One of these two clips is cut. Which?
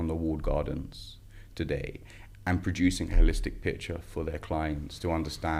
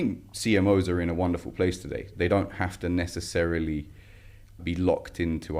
second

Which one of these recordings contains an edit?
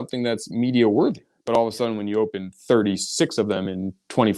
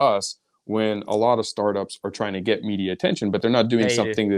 first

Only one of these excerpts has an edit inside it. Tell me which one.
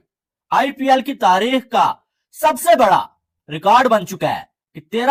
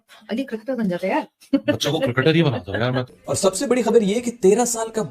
second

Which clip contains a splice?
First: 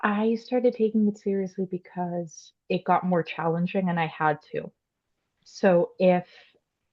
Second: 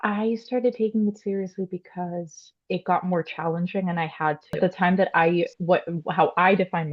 second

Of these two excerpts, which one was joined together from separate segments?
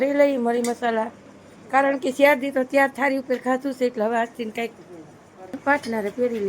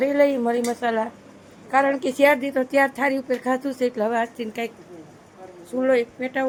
first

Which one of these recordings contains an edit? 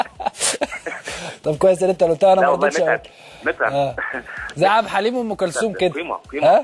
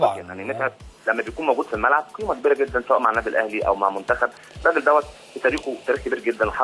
second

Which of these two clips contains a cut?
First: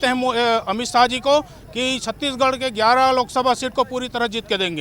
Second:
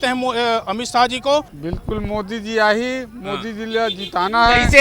second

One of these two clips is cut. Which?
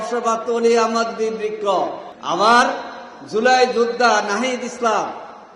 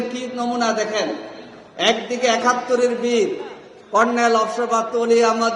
first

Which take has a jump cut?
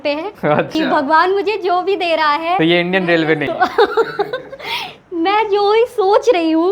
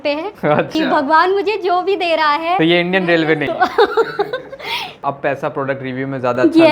second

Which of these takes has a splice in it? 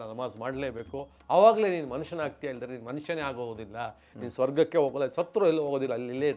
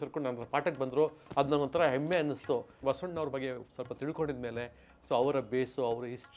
second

